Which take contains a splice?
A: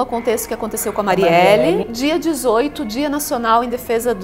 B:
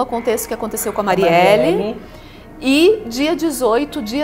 A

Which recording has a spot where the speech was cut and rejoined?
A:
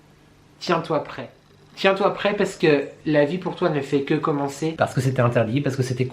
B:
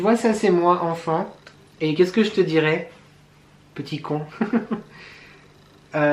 A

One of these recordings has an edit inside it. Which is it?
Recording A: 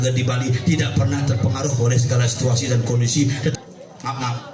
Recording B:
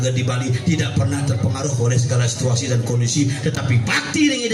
A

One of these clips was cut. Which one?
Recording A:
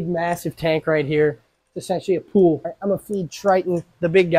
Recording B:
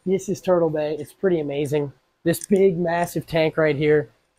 A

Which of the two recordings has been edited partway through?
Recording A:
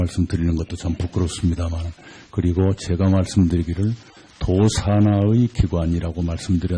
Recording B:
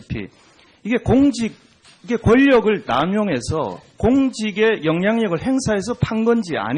B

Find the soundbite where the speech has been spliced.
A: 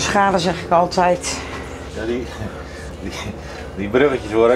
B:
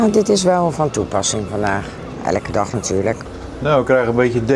B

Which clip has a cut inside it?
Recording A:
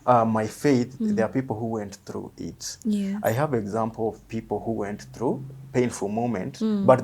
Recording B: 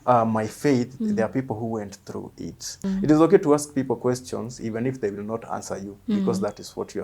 B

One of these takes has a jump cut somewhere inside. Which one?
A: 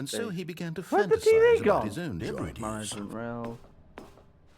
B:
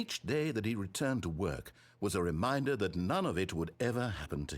A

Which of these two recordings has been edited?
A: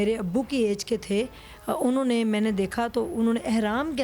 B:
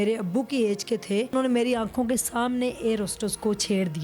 B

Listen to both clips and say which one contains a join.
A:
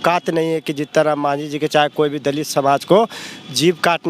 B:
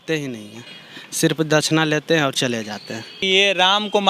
B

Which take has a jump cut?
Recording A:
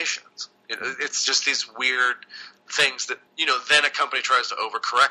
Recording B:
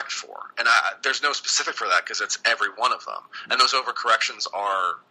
A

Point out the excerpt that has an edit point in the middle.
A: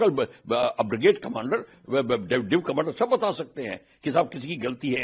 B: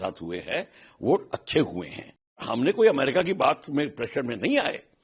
B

